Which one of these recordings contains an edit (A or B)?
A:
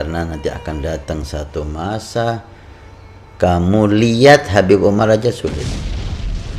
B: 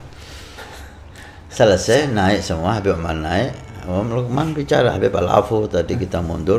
A